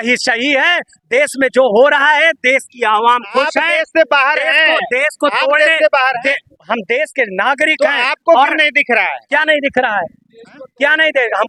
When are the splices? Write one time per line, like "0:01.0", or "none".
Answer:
none